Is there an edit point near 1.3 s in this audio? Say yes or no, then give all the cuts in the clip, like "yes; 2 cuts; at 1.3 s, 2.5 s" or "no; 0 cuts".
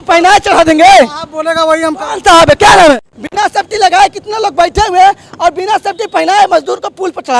no; 1 cut; at 3.0 s